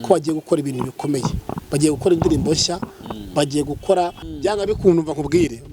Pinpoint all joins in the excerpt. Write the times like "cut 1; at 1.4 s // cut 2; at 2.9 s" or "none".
cut 1; at 4.2 s

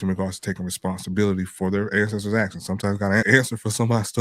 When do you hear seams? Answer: cut 1; at 1.5 s // cut 2; at 3.2 s

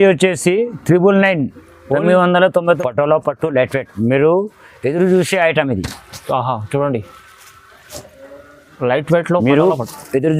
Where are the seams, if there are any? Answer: cut 1; at 2.8 s

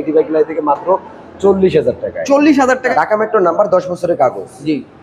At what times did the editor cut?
cut 1; at 2.8 s

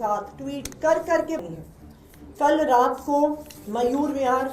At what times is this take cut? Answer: cut 1; at 1.4 s

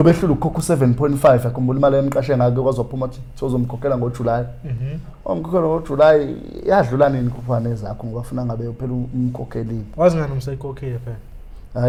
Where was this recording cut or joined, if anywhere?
none

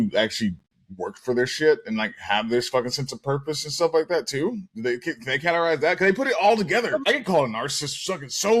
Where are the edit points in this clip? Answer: cut 1; at 6.9 s

